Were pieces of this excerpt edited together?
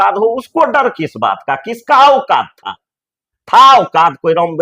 no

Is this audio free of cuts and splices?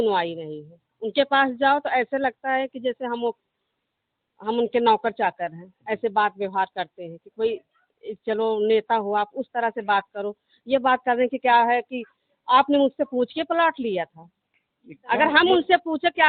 yes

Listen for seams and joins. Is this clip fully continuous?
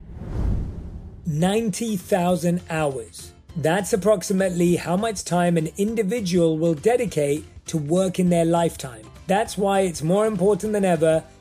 no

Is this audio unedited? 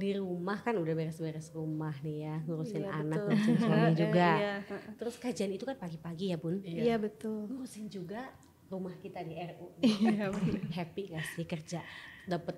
yes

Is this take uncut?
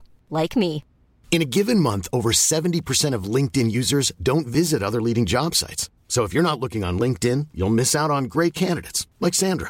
yes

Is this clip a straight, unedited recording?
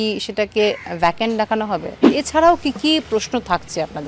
no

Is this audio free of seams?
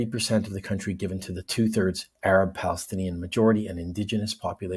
yes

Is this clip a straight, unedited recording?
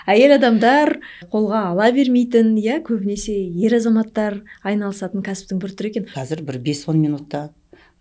no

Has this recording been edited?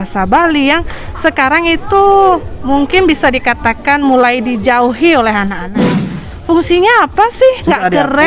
yes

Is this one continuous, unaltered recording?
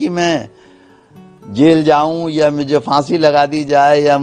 yes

